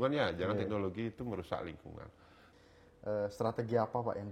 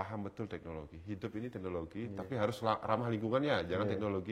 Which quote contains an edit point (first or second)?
first